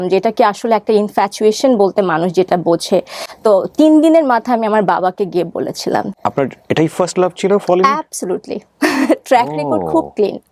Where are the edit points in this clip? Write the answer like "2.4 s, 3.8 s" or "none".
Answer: 3.2 s, 6.1 s